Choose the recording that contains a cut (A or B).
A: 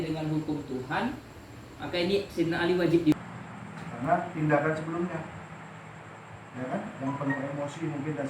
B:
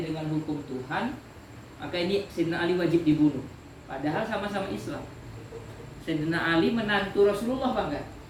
A